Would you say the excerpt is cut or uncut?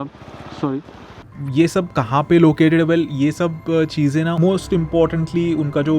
cut